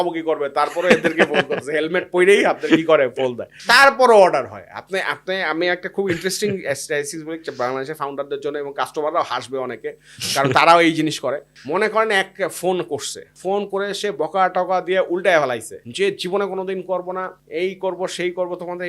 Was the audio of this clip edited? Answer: no; 0 cuts

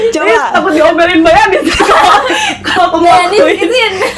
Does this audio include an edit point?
no; 0 cuts

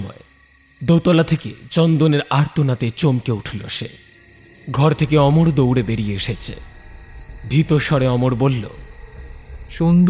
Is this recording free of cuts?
yes; 0 cuts

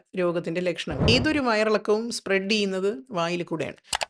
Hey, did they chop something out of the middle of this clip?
yes; 1 cut; at 1.1 s

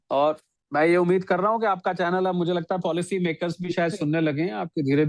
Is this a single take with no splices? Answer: yes; 0 cuts

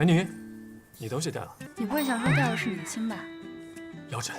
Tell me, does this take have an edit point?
yes; 1 cut; at 1.6 s

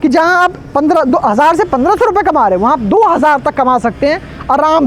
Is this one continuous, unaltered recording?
yes; 0 cuts

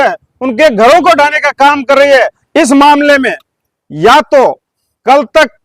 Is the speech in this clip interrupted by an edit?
yes; 1 cut; at 2.4 s

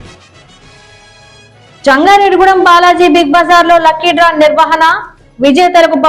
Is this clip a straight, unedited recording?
yes; 0 cuts

